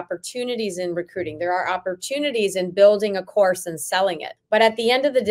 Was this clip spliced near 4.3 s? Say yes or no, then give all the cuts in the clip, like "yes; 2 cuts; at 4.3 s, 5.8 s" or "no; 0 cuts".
yes; 1 cut; at 4.3 s